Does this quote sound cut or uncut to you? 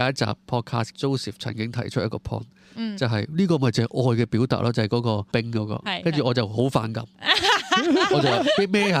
cut